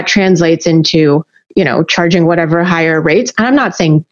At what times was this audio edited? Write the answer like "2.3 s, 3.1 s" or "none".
1.4 s